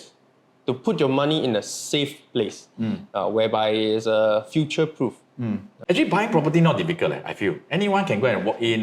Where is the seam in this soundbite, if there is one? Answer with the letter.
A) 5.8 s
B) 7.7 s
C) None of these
A